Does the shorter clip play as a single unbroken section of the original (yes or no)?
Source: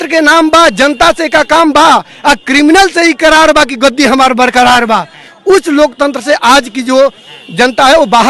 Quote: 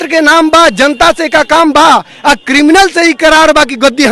yes